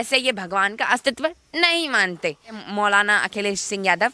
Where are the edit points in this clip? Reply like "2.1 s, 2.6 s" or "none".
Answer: 2.5 s